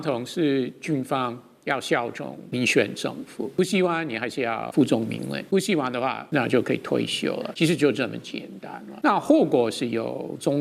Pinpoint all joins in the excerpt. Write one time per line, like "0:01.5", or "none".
0:02.4
0:03.6
0:04.7
0:05.4
0:06.2
0:07.5
0:08.9

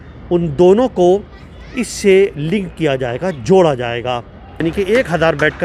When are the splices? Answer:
0:04.6

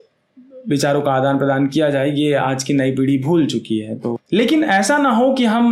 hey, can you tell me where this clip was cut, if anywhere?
0:04.1

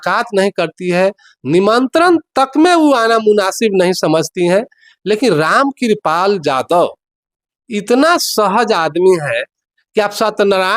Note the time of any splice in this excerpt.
none

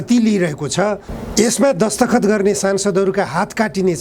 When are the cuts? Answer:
0:01.1

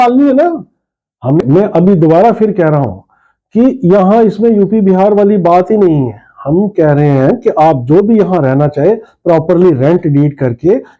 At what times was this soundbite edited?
0:01.4

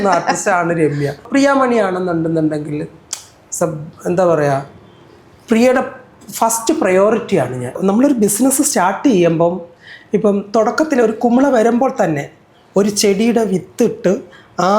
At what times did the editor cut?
0:01.2
0:07.8

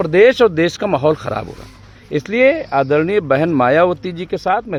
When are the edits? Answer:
none

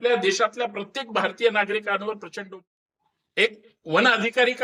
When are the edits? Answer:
0:02.4

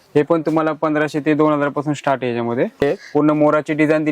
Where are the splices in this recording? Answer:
0:02.8

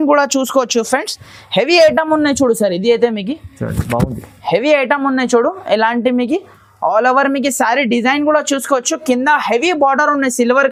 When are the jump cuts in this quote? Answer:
none

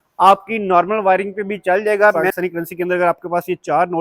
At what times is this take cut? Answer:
0:02.2

